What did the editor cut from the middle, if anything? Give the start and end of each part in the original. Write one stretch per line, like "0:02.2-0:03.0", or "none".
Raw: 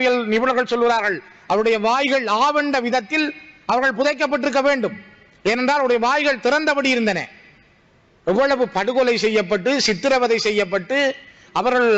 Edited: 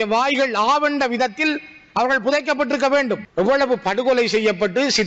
0:05.0-0:08.2